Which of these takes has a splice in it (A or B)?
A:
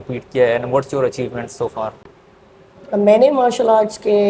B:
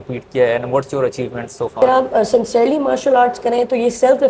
B